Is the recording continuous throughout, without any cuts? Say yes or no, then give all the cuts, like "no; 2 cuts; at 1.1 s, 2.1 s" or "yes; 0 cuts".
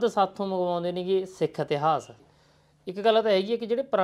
no; 1 cut; at 2.3 s